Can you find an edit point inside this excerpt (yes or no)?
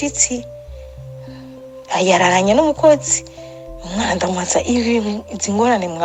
no